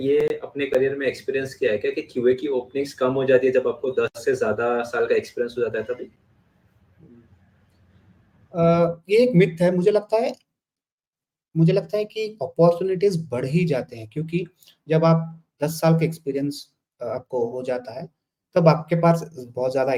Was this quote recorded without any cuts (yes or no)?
yes